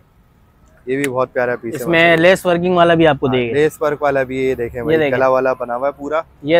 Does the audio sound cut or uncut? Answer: uncut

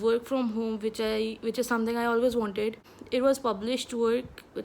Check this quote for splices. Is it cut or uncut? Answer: cut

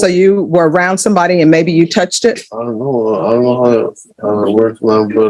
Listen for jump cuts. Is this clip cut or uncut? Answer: uncut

